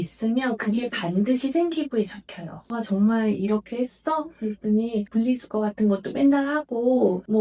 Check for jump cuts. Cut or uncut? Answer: cut